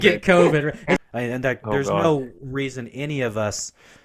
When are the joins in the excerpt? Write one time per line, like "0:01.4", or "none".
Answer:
0:01.0